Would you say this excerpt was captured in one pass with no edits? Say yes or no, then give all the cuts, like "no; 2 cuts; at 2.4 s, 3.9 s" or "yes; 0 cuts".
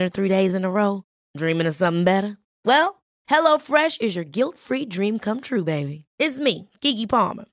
yes; 0 cuts